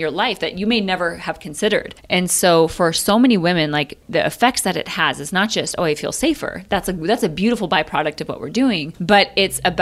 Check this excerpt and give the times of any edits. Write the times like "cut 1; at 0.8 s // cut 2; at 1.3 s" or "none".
cut 1; at 2.0 s // cut 2; at 4.0 s // cut 3; at 8.9 s